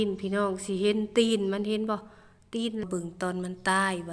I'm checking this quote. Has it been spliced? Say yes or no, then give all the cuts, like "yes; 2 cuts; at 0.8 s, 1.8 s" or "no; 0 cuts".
yes; 1 cut; at 2.8 s